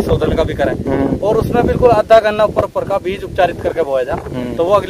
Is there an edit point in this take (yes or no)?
no